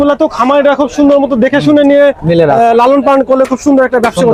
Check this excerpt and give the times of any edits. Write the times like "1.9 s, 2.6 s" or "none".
none